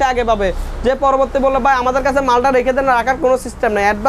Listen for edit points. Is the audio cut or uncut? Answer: uncut